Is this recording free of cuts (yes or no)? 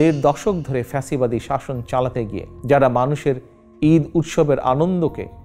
no